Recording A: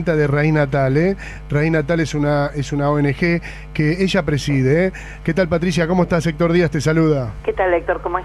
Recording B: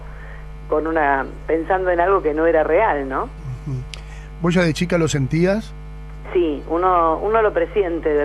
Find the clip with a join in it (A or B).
B